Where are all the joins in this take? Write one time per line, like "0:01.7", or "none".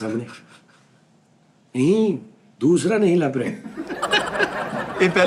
none